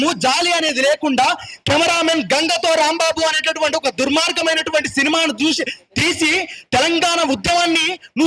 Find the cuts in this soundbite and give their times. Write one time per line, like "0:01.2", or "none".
none